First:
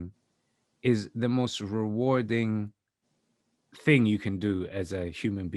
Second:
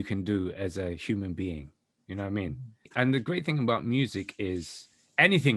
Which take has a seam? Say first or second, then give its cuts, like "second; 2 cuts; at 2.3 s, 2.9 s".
second; 1 cut; at 2.9 s